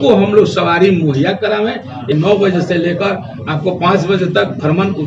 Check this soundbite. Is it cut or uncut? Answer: cut